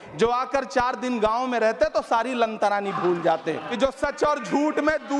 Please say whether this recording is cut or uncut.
cut